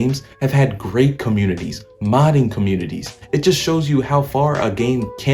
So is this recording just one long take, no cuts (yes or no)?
yes